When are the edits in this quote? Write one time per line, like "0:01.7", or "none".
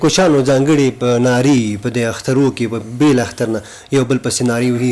none